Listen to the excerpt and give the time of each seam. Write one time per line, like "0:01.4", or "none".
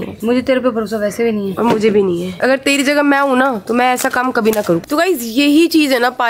0:02.3